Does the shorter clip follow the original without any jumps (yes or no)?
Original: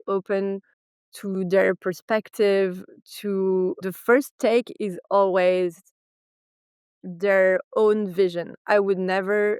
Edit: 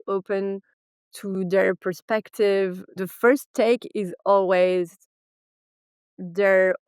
no